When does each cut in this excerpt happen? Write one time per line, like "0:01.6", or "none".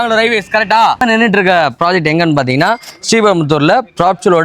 0:01.0